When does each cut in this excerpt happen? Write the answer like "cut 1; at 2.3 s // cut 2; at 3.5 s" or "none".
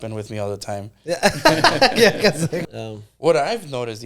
cut 1; at 2.6 s